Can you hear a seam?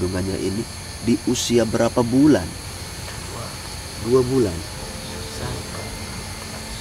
yes; 1 cut; at 2.7 s

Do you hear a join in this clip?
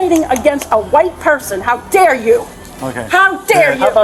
no; 0 cuts

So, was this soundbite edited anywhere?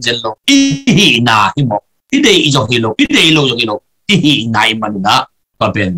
no; 0 cuts

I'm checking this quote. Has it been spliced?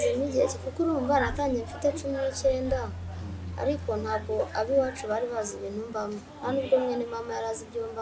no; 0 cuts

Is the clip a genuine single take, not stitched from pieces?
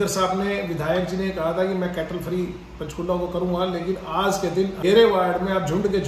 no; 1 cut; at 4.8 s

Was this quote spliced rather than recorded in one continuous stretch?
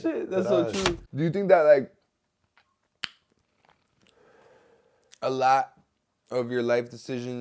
yes; 1 cut; at 1.0 s

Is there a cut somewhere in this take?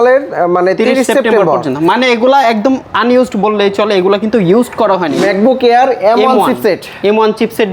yes; 1 cut; at 5.1 s

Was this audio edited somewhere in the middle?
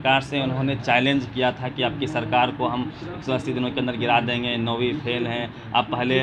no; 0 cuts

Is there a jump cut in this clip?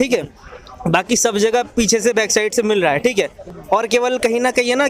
no; 0 cuts

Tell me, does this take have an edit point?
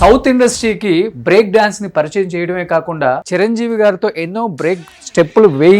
yes; 1 cut; at 3.2 s

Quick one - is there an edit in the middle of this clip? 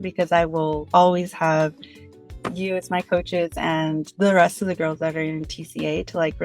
no; 0 cuts

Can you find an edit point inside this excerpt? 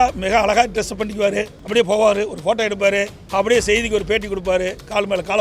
yes; 2 cuts; at 1.6 s, 3.2 s

